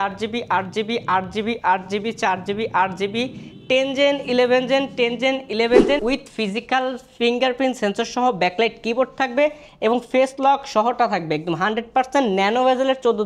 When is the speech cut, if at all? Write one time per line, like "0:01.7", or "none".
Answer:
0:06.0